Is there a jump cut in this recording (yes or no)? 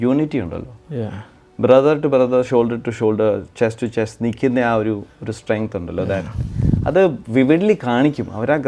no